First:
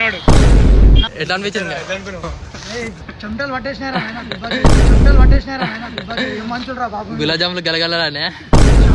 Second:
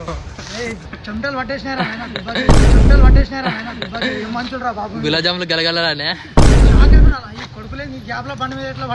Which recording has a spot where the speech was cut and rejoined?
first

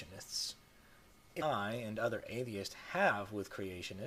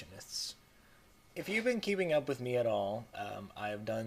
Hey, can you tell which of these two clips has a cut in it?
second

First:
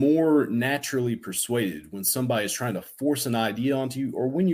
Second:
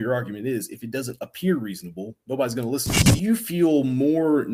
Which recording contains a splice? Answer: second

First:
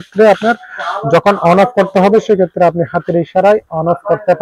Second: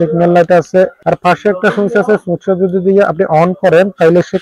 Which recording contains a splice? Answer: second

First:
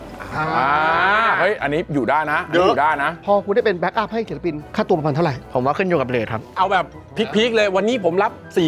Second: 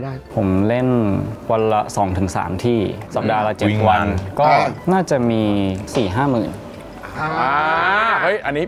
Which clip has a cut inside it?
first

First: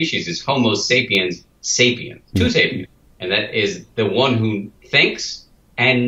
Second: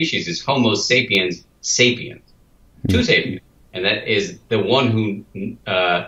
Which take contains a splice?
first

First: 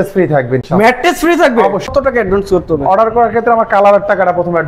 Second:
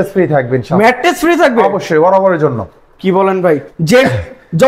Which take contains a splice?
first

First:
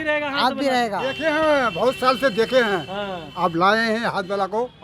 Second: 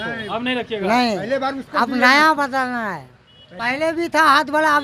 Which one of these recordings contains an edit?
second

